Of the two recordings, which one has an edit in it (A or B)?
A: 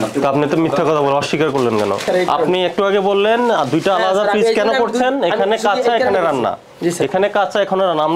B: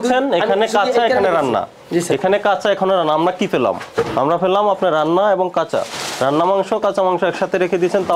A